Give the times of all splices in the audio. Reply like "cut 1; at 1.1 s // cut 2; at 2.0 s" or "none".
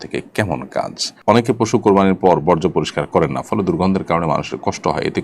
cut 1; at 1.1 s